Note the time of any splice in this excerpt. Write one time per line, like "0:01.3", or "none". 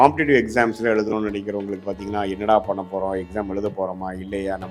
none